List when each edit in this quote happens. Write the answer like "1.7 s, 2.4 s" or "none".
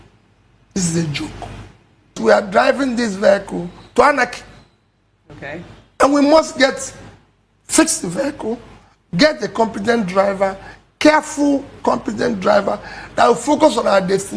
2.2 s